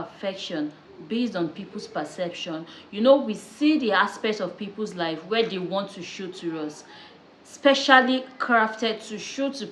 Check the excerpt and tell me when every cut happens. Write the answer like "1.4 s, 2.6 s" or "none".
none